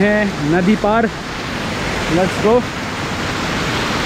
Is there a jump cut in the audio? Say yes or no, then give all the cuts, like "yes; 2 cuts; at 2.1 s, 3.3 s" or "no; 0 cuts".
no; 0 cuts